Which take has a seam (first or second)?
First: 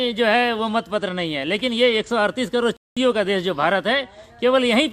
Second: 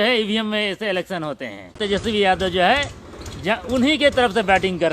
second